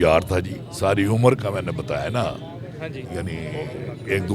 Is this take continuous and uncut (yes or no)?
yes